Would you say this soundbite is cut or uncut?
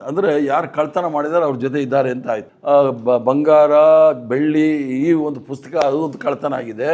cut